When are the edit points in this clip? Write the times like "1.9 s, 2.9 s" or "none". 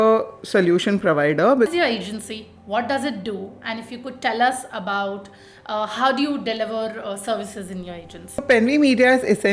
1.7 s, 8.4 s

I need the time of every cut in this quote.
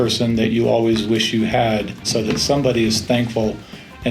2.1 s

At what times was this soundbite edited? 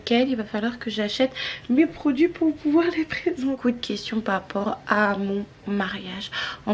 3.6 s

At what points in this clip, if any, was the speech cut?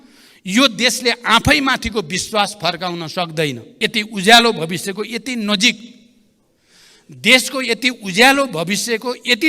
3.7 s

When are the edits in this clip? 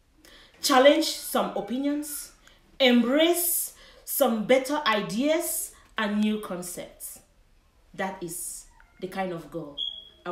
none

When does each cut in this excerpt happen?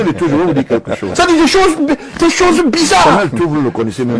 1.0 s, 3.1 s

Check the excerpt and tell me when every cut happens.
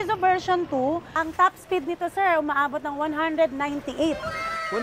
1.1 s

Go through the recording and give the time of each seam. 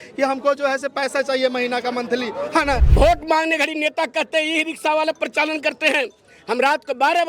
2.9 s

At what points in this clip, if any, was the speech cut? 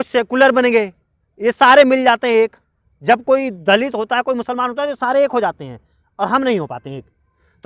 none

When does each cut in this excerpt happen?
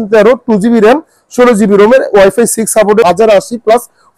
3.0 s

